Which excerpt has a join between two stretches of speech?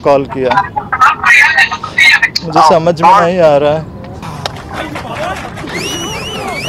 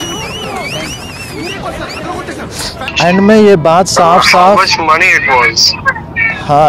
second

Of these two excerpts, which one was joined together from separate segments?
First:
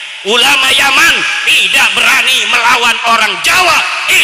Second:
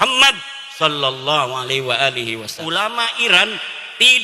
second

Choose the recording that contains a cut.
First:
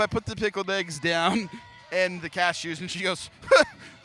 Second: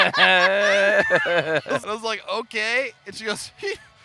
second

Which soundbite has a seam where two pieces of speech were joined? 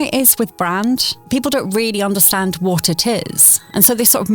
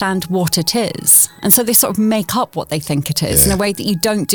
first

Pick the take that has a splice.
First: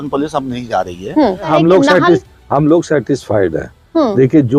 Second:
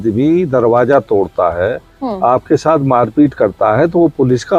first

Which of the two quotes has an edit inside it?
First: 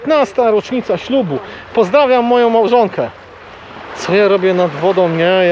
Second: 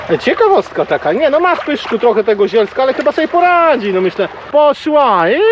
second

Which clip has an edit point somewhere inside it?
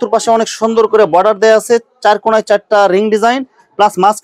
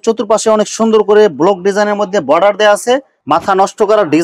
second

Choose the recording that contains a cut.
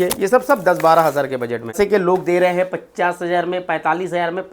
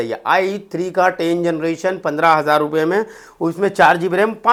first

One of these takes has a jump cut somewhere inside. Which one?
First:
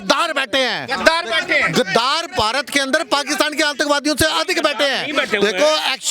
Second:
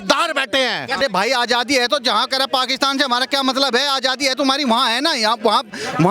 second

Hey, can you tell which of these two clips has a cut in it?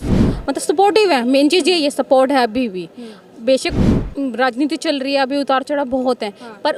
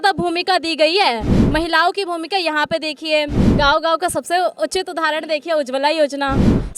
second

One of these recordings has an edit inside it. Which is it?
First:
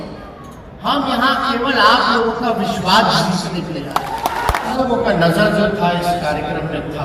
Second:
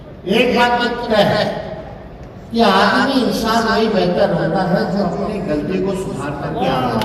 first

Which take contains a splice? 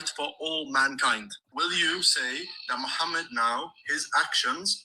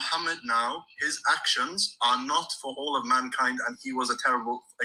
first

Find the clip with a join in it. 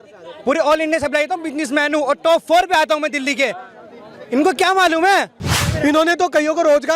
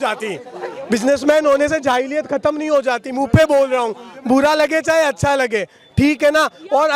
first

